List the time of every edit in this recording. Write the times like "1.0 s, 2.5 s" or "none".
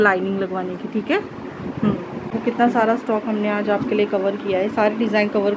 2.3 s